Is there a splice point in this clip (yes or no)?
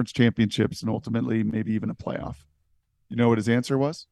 no